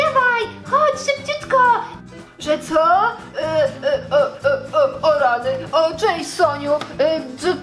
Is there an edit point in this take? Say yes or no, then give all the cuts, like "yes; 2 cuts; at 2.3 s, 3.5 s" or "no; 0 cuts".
yes; 1 cut; at 2.1 s